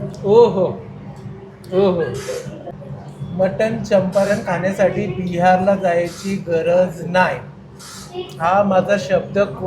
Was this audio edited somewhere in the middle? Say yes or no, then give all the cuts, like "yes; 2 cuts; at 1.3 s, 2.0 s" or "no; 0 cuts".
yes; 1 cut; at 2.7 s